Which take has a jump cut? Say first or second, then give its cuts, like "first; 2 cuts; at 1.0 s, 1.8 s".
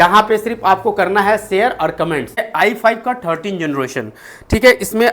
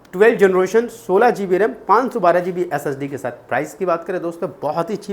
first; 1 cut; at 2.5 s